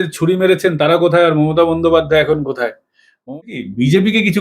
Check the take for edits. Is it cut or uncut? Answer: cut